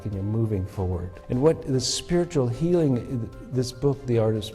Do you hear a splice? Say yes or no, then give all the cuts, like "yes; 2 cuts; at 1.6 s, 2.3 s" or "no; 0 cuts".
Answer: yes; 1 cut; at 1.1 s